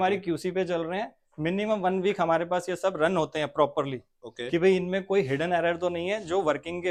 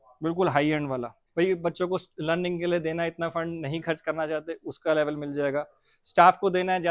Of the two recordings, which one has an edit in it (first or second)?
second